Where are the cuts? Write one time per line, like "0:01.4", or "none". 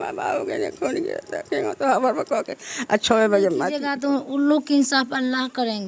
0:03.7

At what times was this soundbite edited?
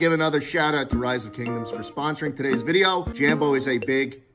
0:03.1

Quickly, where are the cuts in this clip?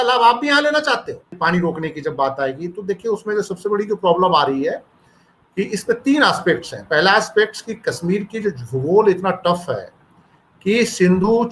0:01.3

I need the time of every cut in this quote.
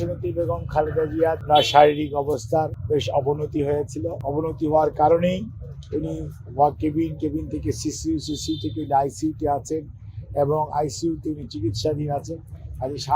0:01.4
0:02.8
0:04.2

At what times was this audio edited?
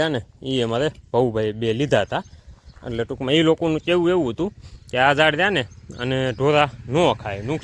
none

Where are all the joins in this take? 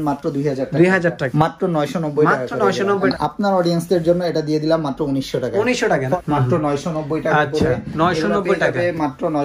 0:01.2
0:03.1
0:06.2

